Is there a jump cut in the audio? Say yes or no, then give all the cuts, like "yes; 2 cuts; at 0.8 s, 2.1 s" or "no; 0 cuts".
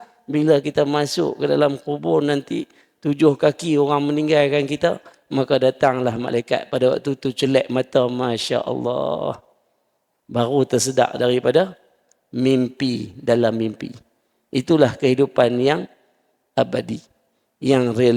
no; 0 cuts